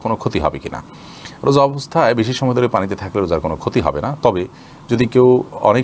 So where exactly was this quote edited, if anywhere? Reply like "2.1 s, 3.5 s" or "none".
none